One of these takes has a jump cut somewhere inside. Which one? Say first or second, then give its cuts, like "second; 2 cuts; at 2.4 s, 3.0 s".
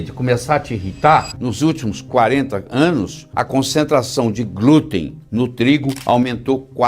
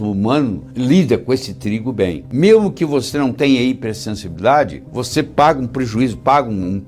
first; 1 cut; at 1.3 s